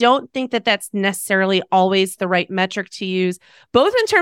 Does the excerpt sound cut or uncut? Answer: uncut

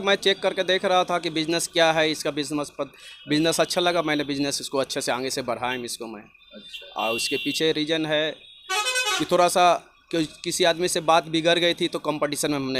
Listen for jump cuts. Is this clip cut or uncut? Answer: uncut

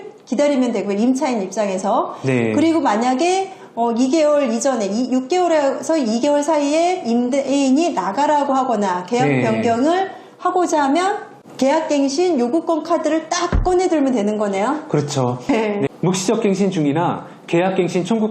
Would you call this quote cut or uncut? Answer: cut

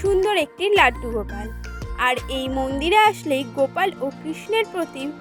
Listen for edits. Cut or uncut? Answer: uncut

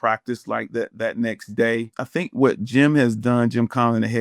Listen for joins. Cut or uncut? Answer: cut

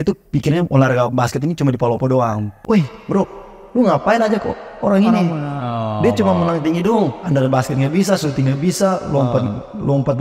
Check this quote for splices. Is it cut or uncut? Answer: cut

